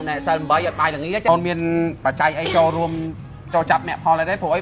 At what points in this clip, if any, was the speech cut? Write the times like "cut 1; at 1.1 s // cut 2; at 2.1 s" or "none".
cut 1; at 1.3 s